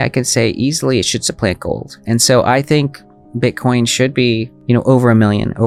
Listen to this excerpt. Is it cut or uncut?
uncut